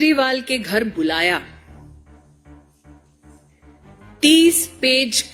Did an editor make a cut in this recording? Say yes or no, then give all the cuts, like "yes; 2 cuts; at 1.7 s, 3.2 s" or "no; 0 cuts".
no; 0 cuts